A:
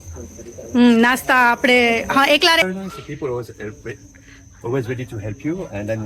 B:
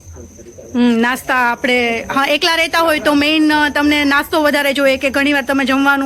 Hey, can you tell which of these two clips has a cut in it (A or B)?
A